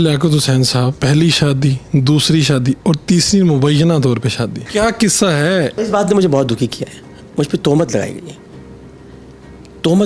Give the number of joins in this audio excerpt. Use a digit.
3